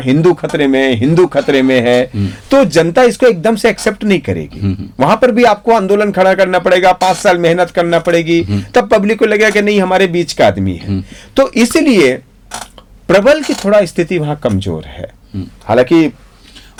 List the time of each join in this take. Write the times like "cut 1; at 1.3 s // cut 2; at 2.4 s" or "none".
none